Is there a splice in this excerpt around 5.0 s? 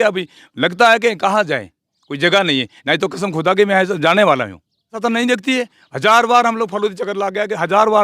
yes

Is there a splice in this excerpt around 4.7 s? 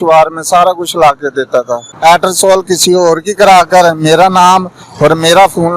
no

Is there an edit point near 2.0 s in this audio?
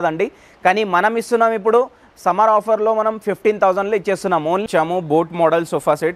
no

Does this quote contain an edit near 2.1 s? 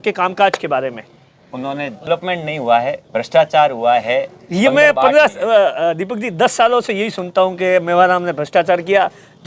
yes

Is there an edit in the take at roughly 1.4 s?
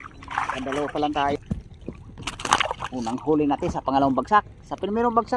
yes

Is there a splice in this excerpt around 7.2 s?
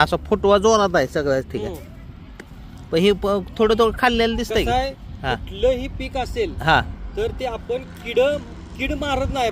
no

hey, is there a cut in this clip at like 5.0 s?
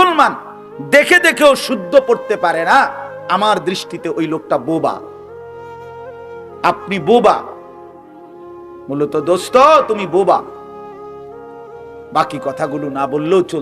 yes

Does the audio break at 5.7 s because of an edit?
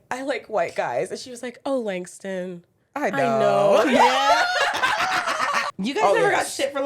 yes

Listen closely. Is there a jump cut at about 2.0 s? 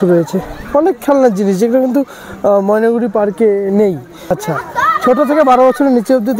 no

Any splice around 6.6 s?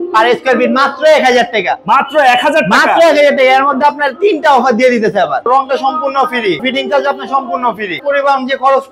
yes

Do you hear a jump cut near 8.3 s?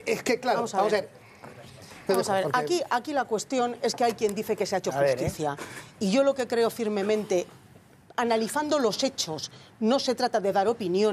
yes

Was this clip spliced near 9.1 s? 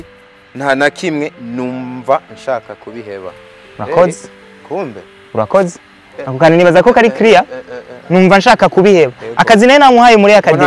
no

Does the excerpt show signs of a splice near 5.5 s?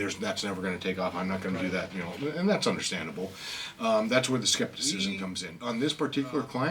yes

